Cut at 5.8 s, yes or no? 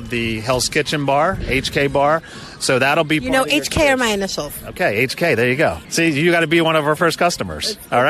yes